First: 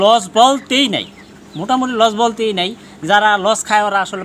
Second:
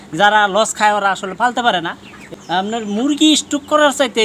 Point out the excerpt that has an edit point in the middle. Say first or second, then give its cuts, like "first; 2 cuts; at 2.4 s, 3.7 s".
second; 1 cut; at 2.3 s